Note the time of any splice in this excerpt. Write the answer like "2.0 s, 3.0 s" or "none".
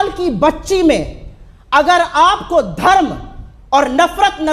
none

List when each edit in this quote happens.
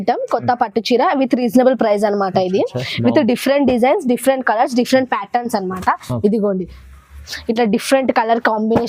none

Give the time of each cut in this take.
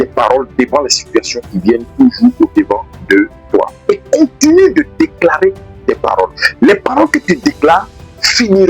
3.8 s, 6.4 s

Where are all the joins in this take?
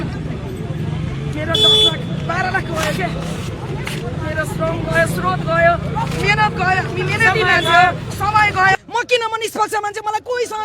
8.8 s

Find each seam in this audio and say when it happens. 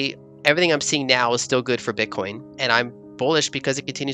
2.5 s

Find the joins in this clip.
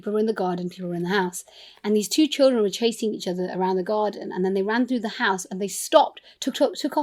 none

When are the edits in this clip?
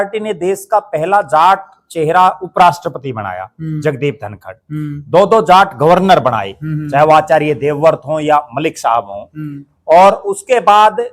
none

